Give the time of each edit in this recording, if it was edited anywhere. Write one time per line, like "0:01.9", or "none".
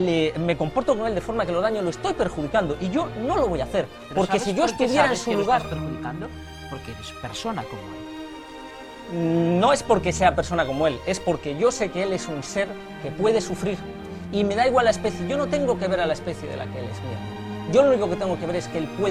none